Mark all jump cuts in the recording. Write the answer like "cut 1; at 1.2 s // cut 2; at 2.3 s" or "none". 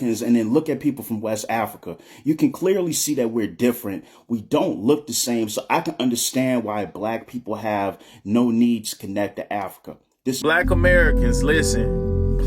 cut 1; at 10.4 s